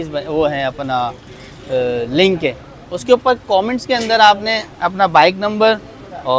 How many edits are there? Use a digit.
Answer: 0